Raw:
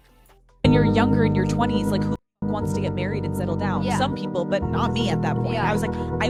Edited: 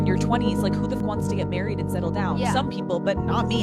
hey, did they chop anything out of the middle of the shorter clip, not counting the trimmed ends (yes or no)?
yes